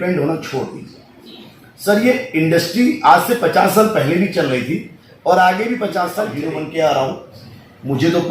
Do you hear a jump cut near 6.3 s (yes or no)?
yes